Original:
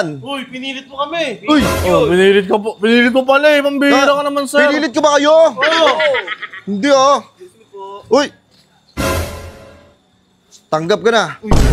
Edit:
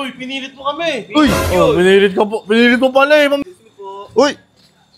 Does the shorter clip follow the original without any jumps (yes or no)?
no